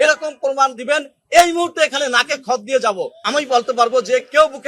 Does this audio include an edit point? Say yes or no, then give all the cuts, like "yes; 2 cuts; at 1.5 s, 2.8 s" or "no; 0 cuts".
yes; 1 cut; at 3.2 s